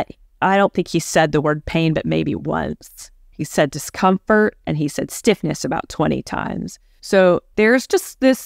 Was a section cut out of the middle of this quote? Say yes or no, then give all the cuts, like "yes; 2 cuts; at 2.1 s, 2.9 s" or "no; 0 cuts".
yes; 1 cut; at 7.5 s